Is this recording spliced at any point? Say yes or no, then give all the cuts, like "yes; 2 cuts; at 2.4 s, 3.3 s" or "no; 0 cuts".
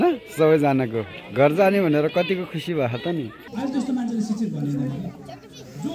yes; 1 cut; at 3.4 s